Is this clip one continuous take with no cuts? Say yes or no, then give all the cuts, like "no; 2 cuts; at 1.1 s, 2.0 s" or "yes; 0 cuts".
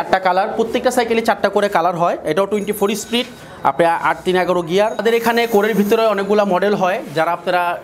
no; 1 cut; at 5.0 s